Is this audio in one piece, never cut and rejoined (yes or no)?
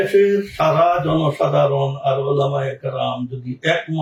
yes